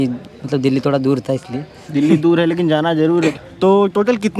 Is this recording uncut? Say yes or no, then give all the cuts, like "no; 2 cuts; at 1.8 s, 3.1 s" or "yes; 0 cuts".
no; 1 cut; at 3.3 s